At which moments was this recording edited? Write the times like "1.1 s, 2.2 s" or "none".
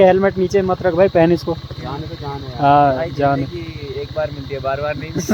none